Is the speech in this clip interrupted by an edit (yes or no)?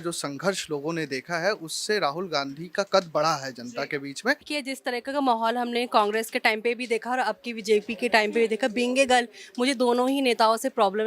yes